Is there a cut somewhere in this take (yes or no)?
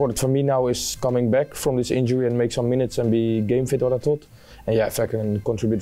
no